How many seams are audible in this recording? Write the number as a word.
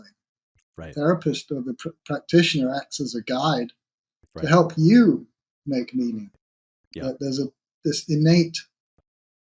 zero